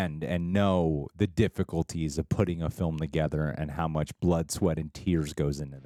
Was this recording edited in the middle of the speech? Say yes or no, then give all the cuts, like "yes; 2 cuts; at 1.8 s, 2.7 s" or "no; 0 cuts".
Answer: no; 0 cuts